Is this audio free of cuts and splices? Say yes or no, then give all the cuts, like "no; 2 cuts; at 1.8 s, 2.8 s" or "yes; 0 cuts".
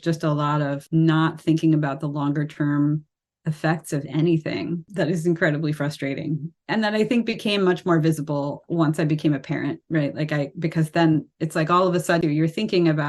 no; 5 cuts; at 0.8 s, 4.9 s, 6.6 s, 8.6 s, 12.2 s